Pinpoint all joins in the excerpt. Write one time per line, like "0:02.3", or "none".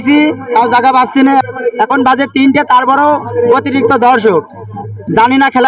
0:01.5